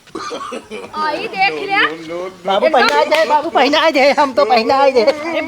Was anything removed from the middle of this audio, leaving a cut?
yes; 1 cut; at 0.9 s

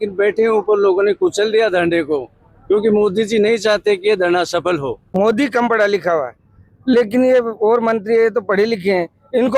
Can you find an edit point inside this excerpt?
yes; 1 cut; at 5.0 s

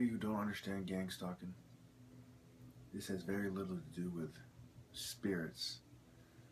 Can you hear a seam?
no; 0 cuts

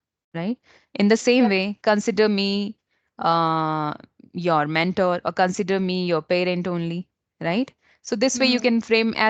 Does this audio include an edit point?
no; 0 cuts

